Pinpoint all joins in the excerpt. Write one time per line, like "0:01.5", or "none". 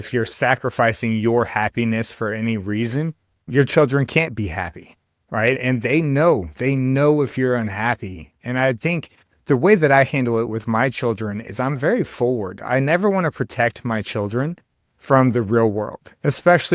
none